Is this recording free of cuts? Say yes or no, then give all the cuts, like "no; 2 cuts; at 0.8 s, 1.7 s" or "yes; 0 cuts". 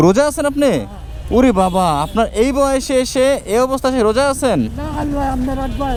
yes; 0 cuts